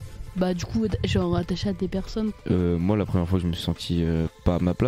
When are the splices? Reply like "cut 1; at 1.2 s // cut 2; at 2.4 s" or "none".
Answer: cut 1; at 2.4 s